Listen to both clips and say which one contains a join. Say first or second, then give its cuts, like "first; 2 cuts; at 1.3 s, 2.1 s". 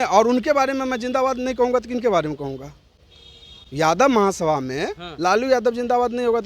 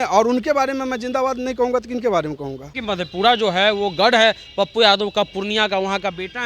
second; 1 cut; at 2.7 s